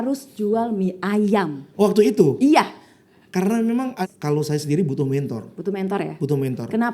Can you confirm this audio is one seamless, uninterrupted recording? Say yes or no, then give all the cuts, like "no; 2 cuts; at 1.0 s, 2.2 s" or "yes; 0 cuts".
no; 1 cut; at 4.1 s